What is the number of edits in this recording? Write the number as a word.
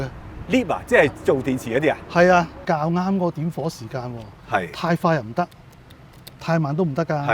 one